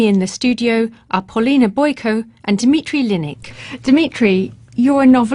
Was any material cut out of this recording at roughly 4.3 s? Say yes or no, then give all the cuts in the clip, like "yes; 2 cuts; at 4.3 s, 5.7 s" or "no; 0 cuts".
yes; 1 cut; at 4.3 s